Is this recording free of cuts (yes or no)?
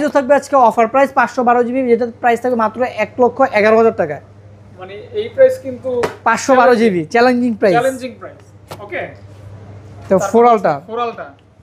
yes